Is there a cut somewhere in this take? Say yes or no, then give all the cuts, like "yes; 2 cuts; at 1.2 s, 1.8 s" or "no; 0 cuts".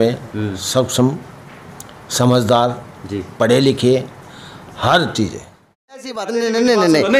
yes; 1 cut; at 5.8 s